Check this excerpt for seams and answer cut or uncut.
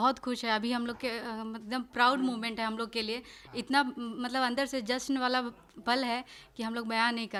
uncut